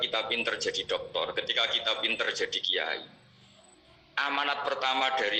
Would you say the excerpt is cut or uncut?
uncut